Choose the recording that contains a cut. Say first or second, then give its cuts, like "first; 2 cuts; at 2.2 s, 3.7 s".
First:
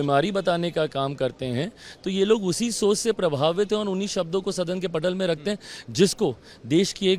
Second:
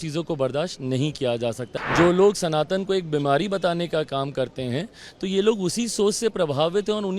second; 1 cut; at 1.7 s